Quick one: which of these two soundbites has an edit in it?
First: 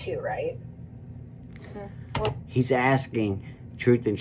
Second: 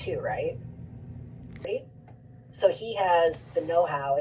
second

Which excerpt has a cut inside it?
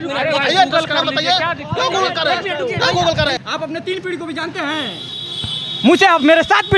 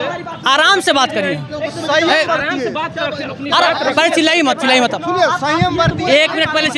first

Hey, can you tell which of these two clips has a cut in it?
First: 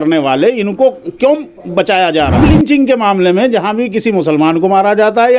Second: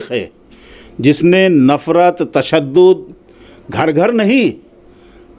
first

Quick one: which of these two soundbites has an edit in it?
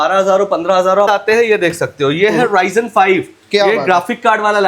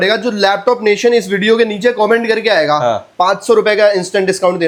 first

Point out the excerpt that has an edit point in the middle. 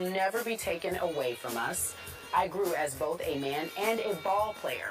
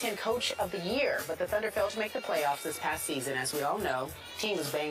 first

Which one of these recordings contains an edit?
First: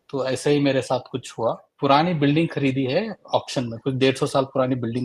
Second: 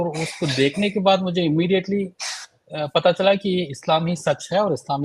first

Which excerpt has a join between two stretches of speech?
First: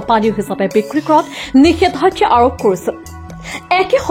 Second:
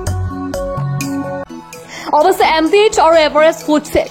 second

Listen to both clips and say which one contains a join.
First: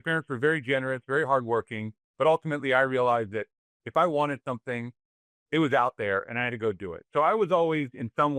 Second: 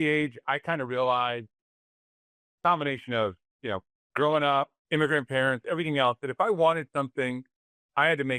second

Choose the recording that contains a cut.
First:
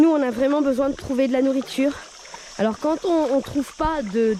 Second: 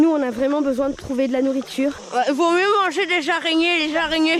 second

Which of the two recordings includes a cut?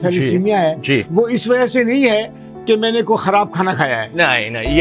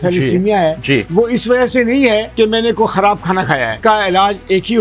second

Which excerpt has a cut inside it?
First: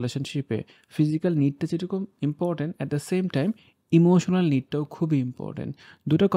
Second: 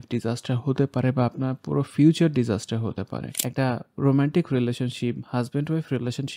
second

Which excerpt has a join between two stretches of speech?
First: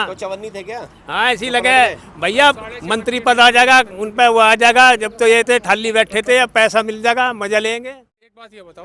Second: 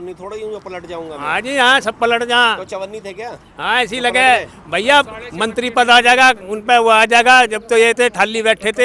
first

